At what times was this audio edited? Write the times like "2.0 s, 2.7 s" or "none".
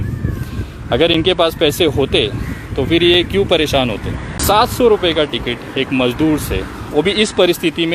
4.3 s

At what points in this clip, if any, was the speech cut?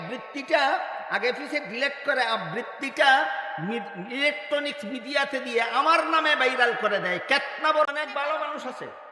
7.8 s

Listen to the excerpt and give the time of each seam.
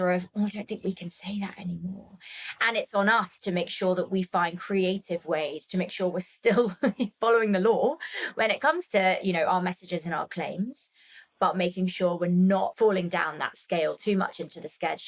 12.7 s

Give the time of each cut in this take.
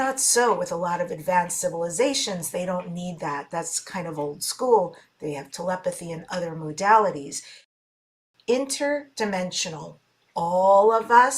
8.0 s

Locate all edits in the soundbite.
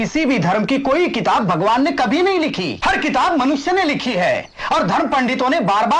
2.7 s

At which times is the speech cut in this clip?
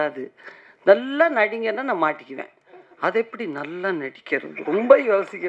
none

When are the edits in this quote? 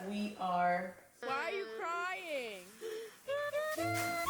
1.0 s

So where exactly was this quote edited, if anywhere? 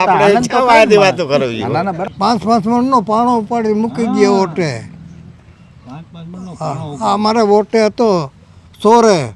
2.0 s

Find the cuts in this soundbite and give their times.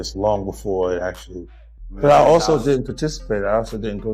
1.9 s

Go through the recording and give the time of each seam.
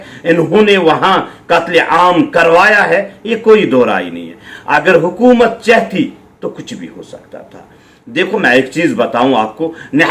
none

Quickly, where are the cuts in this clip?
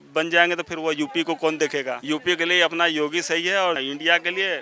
2.0 s, 3.8 s

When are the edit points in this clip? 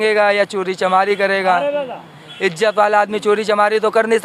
none

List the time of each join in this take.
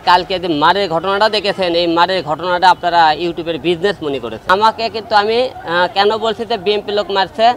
4.3 s

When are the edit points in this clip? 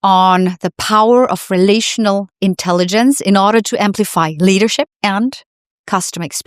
4.9 s

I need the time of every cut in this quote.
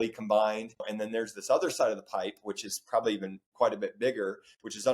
0.9 s

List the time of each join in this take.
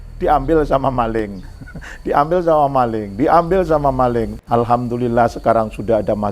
4.3 s

